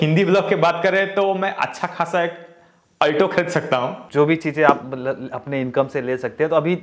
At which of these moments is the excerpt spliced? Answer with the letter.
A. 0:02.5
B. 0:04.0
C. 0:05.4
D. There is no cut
B